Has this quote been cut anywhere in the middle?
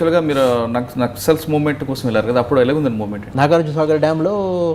yes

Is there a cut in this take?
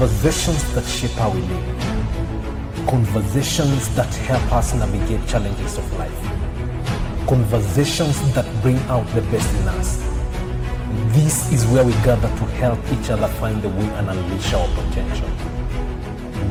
no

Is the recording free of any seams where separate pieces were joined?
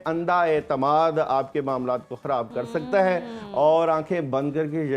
yes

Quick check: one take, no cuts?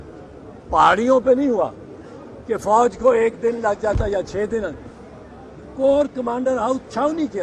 yes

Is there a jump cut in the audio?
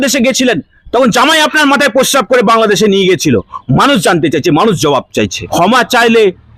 yes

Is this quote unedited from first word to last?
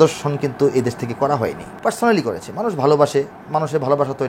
no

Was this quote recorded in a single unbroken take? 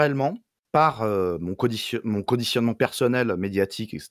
yes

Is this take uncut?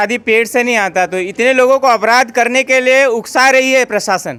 yes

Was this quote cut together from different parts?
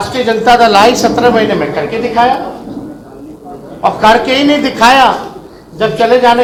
no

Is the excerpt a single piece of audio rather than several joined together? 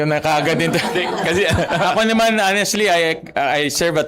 yes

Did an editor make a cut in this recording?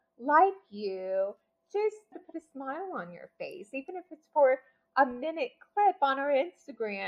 yes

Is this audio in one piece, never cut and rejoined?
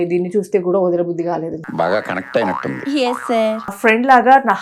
no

